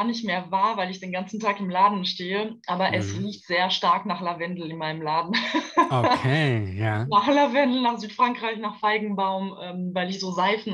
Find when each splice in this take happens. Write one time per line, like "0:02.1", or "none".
none